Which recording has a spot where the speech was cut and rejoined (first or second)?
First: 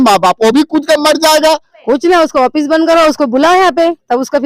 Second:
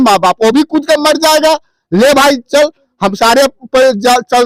first